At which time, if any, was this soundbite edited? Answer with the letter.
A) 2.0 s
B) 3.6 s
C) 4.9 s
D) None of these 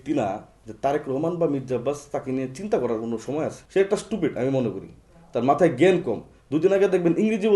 B